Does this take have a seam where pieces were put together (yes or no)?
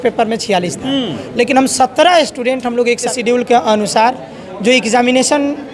yes